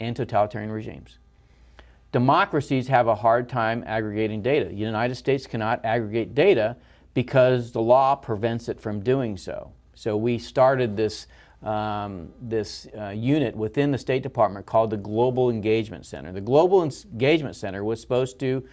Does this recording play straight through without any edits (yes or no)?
no